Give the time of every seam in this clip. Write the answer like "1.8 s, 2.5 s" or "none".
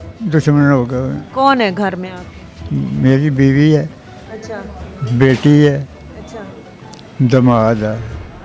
none

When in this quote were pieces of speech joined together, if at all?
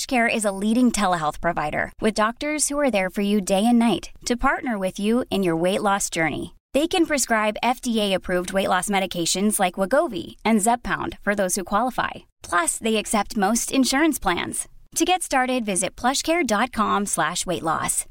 none

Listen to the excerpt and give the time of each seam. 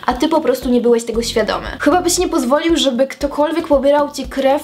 none

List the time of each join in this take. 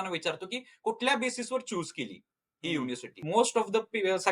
3.2 s

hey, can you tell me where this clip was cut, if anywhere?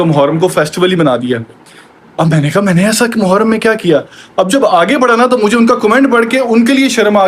none

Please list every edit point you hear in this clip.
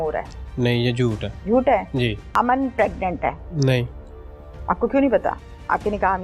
1.3 s, 2.2 s, 3.5 s

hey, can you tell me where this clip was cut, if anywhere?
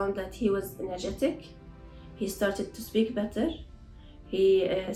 none

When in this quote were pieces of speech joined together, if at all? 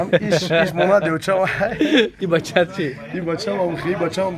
2.2 s

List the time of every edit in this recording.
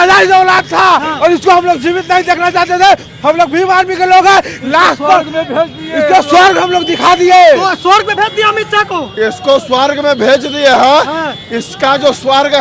none

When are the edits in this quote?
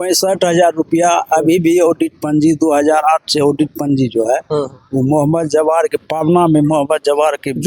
none

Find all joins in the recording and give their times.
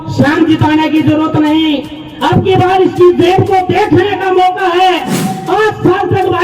5.3 s

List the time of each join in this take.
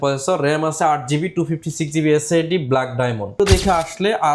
3.4 s

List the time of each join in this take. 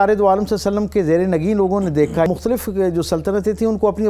2.3 s

